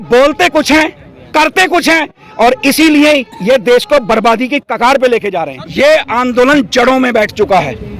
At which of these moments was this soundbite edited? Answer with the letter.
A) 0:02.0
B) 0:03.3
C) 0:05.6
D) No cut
C